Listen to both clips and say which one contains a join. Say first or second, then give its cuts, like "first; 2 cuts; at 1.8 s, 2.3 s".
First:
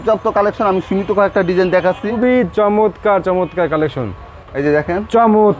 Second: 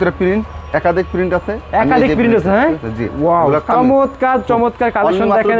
first; 2 cuts; at 2.1 s, 4.5 s